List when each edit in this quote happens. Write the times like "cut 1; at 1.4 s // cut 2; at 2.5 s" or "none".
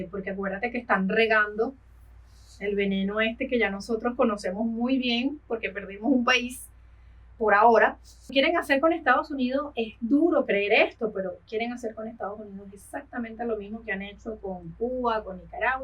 cut 1; at 8.3 s